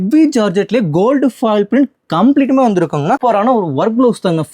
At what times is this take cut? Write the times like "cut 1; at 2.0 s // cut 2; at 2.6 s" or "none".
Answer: cut 1; at 3.2 s